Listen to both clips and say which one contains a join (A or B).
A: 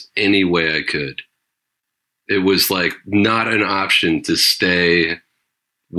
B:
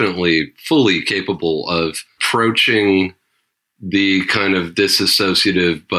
B